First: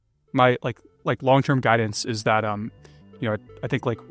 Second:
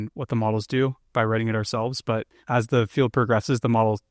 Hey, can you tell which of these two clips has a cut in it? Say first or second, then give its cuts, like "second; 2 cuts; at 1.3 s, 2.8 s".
second; 1 cut; at 2.4 s